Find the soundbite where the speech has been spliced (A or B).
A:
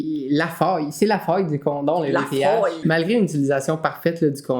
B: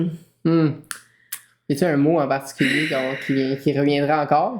A